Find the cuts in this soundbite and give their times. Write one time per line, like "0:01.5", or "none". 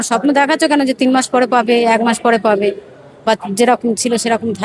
none